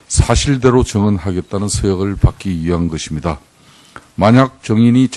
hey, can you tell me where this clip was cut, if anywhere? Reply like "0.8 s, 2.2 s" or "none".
2.0 s